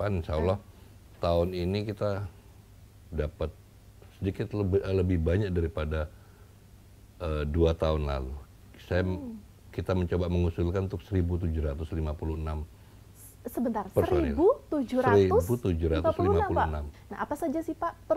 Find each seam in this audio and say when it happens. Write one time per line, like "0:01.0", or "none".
0:16.9

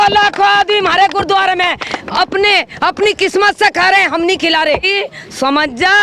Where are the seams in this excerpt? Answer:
0:04.9

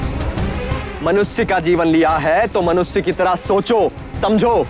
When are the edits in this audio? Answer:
0:01.0

